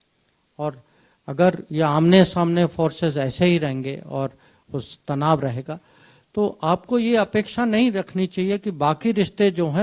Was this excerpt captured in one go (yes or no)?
yes